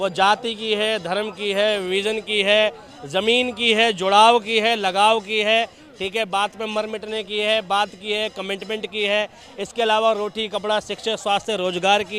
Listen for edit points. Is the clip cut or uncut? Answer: uncut